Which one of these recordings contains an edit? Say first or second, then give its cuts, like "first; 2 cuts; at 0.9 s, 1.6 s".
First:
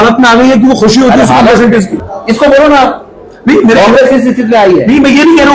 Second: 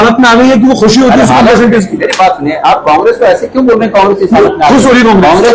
first; 1 cut; at 2.0 s